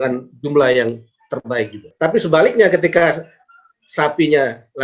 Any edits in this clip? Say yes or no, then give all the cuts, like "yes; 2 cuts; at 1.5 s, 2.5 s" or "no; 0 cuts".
yes; 1 cut; at 1.8 s